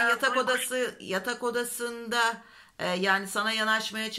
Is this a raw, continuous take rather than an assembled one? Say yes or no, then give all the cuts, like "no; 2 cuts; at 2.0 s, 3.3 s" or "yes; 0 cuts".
yes; 0 cuts